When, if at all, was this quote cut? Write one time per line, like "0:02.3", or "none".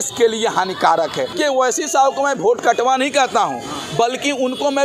0:01.3